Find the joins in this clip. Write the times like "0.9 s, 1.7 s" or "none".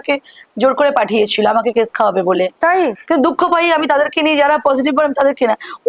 2.9 s